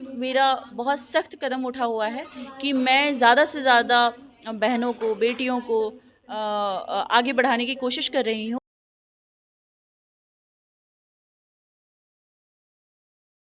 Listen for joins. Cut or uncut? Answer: uncut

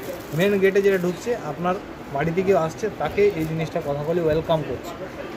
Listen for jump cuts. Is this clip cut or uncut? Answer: uncut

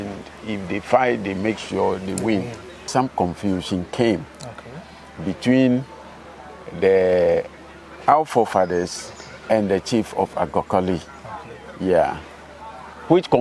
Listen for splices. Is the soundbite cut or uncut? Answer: cut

